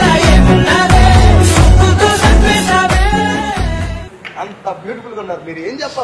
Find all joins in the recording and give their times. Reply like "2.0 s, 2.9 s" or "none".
none